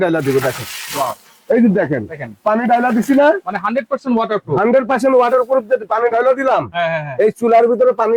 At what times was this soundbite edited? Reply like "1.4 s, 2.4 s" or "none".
none